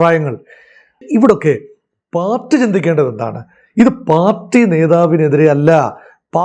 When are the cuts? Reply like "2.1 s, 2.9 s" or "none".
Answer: 1.0 s